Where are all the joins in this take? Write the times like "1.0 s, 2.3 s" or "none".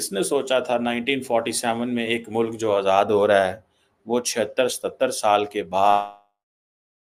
none